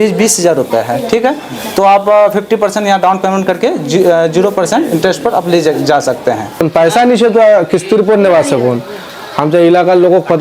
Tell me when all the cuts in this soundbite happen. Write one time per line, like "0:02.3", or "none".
0:06.7

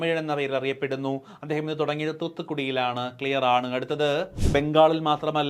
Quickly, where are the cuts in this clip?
0:04.4

